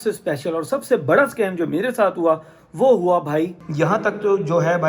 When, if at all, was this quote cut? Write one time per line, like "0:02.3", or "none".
0:03.6